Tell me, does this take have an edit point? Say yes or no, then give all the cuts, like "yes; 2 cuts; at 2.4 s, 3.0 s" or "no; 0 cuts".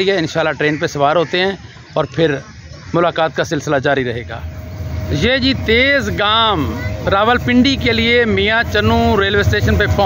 no; 0 cuts